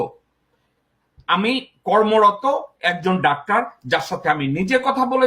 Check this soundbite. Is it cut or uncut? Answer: uncut